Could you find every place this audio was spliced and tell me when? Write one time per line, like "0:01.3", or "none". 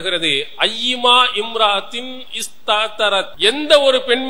0:03.3